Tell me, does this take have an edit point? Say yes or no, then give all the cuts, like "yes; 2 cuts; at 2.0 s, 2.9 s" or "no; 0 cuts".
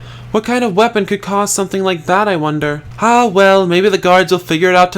yes; 1 cut; at 2.9 s